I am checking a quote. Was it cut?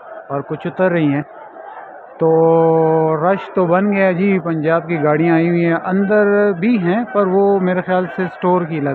no; 0 cuts

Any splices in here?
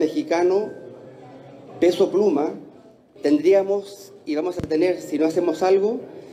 yes; 1 cut; at 3.1 s

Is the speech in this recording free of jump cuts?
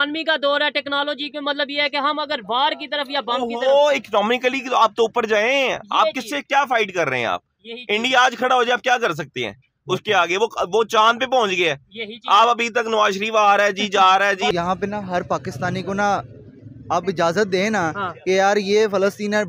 no; 1 cut; at 14.5 s

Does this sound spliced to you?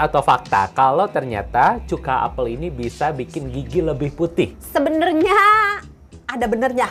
no; 0 cuts

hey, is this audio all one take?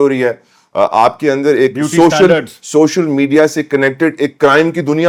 yes; 0 cuts

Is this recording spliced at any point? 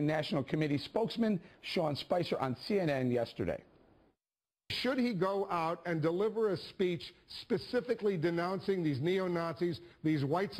no; 0 cuts

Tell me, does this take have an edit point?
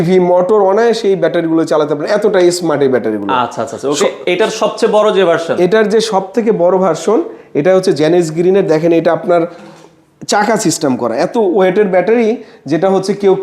no; 0 cuts

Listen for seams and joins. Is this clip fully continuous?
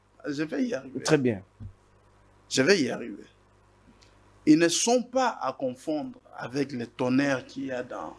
yes; 0 cuts

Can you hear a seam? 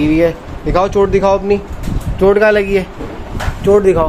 no; 0 cuts

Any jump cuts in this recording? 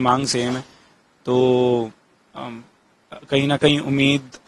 no; 0 cuts

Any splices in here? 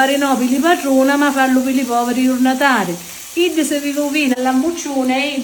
yes; 1 cut; at 4.4 s

